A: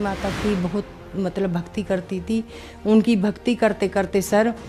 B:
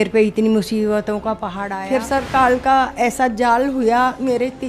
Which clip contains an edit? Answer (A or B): B